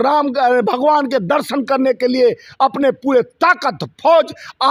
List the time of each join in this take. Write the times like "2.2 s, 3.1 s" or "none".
none